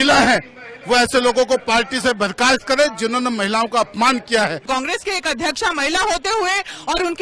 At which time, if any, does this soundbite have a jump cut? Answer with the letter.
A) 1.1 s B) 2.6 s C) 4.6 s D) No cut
C